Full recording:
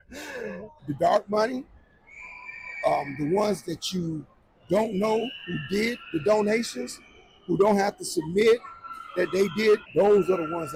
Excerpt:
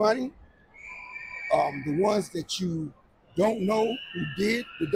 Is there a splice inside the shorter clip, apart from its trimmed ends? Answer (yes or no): no